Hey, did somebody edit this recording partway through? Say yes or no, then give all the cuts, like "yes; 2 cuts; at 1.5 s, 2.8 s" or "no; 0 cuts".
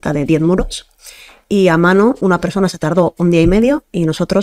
yes; 1 cut; at 2.2 s